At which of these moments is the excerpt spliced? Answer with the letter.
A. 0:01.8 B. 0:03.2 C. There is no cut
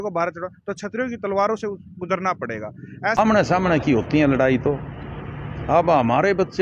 B